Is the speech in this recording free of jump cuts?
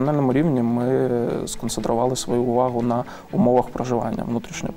yes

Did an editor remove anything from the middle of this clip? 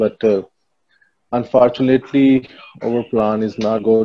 no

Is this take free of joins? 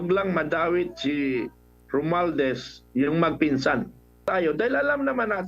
no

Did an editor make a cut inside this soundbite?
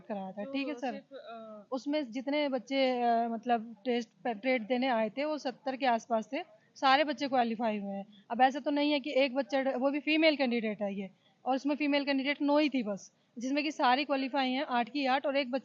no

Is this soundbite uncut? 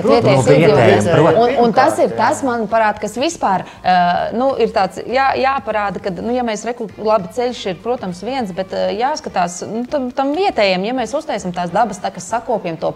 yes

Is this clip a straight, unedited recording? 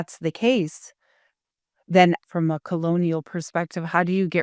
no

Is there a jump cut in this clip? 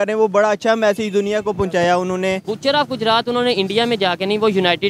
yes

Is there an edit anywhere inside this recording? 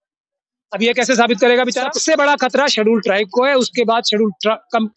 yes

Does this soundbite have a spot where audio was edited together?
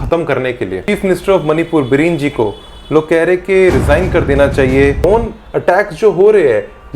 yes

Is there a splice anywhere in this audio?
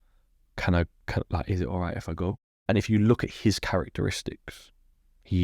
yes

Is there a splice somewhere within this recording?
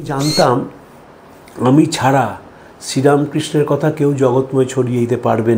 no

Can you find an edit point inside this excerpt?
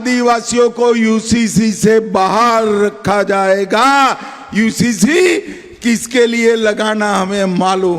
no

